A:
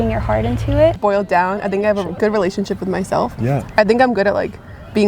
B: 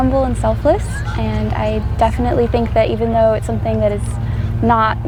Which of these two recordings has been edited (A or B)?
A